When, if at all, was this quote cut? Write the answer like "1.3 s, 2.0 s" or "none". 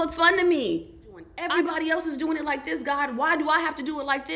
1.3 s